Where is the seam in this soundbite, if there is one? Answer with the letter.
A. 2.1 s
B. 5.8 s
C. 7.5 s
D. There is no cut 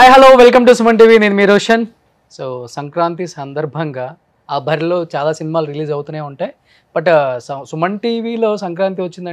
D